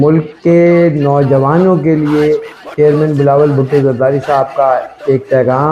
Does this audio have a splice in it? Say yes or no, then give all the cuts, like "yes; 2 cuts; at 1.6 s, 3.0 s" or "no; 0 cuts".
no; 0 cuts